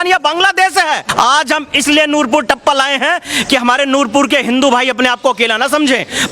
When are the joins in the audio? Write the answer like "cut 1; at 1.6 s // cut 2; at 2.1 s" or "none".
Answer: cut 1; at 1.1 s

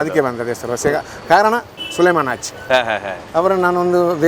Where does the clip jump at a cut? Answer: cut 1; at 1.8 s

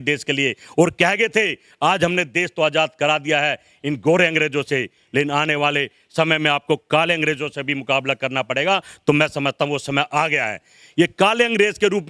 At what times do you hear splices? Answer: none

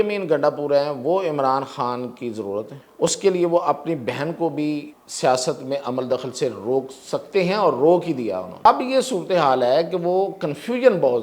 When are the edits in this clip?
cut 1; at 2.8 s // cut 2; at 5.0 s // cut 3; at 8.5 s

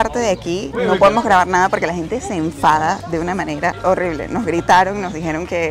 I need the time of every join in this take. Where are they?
none

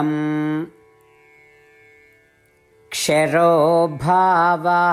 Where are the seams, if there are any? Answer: cut 1; at 1.3 s // cut 2; at 2.9 s

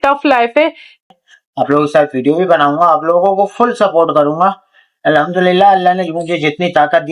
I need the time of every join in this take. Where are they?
cut 1; at 1.1 s

